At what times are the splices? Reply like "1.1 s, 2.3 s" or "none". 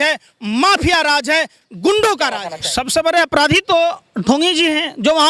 2.6 s